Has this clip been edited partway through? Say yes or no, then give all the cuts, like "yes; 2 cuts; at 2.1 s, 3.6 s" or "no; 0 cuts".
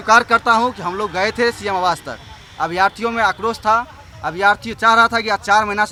no; 0 cuts